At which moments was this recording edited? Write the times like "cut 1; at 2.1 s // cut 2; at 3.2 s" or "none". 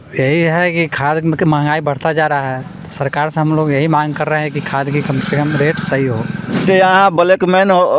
cut 1; at 6.6 s

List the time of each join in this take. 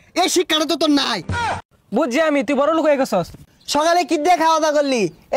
cut 1; at 1.6 s // cut 2; at 3.4 s

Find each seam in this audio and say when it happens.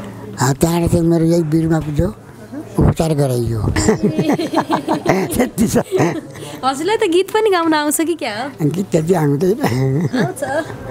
cut 1; at 3.8 s

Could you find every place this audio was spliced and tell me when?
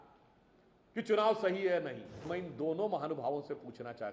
cut 1; at 2.3 s

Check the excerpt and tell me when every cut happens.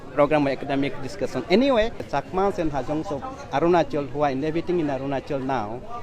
cut 1; at 2.0 s

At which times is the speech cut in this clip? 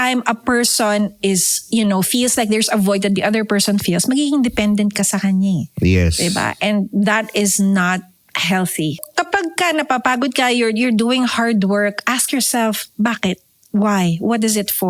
cut 1; at 9.0 s

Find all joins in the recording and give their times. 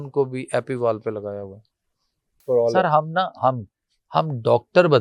cut 1; at 2.4 s

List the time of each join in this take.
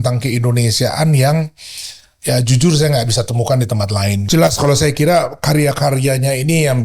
cut 1; at 4.2 s

